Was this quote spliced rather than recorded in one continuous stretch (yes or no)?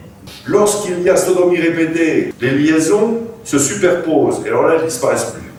no